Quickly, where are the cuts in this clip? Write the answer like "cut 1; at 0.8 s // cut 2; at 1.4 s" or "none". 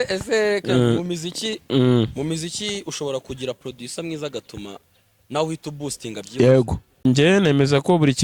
cut 1; at 7.0 s